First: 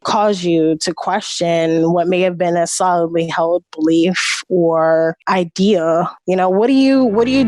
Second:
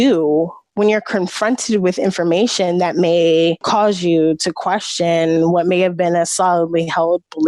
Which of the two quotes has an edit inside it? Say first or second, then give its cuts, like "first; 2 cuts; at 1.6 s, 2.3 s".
first; 1 cut; at 6.2 s